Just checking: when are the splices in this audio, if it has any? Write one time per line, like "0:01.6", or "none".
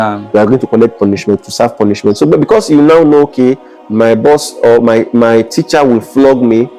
none